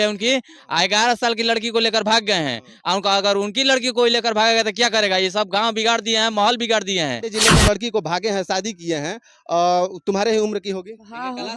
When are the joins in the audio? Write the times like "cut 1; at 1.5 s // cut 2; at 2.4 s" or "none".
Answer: cut 1; at 7.3 s